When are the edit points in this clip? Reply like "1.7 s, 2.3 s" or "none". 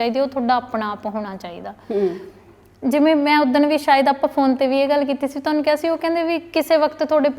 none